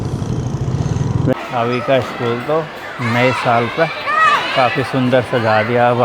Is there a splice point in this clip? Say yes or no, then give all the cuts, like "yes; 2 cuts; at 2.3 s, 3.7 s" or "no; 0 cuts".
yes; 1 cut; at 1.3 s